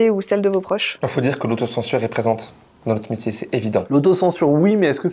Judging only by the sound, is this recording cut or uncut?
uncut